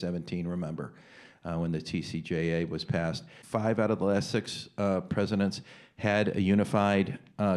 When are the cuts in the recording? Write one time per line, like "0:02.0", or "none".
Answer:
0:03.3